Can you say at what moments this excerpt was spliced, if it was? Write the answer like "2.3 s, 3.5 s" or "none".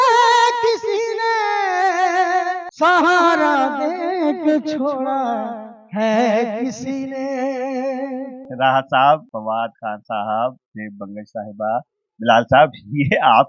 2.6 s, 8.4 s, 9.3 s